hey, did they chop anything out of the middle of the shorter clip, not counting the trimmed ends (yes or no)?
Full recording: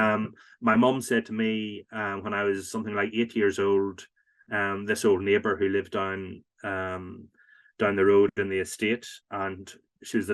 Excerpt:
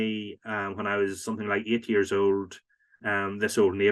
no